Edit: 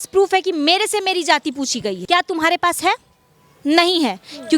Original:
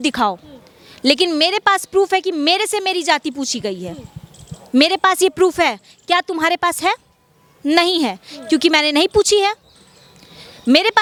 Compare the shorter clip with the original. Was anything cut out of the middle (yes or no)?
yes